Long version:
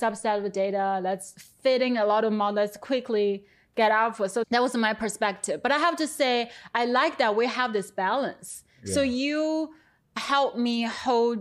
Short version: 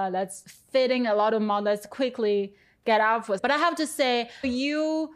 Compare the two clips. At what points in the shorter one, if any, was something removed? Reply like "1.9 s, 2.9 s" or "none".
3.4 s, 4.4 s